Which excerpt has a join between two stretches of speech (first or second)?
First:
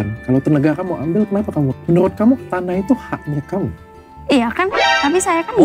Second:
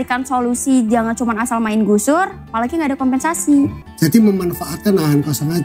second